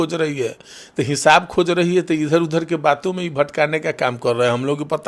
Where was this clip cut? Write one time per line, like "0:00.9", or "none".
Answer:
none